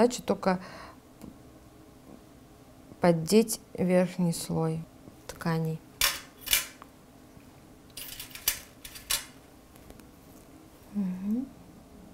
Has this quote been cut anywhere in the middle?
no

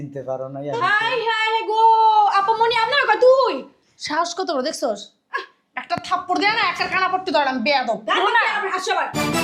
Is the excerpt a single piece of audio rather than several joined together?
yes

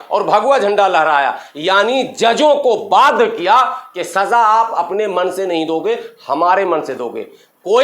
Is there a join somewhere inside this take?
no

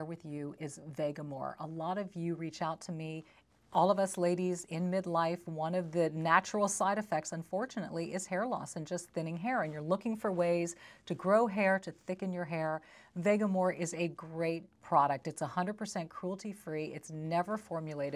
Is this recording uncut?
yes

